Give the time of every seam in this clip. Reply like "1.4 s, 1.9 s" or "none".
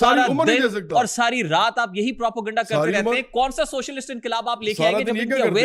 none